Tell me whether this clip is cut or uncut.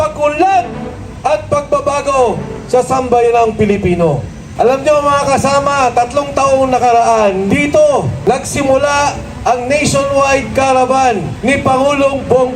cut